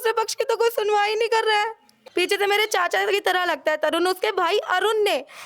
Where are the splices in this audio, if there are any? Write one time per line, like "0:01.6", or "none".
0:02.0